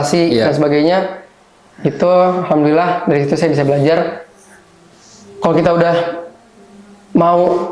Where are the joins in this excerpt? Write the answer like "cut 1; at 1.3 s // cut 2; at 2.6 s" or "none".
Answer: none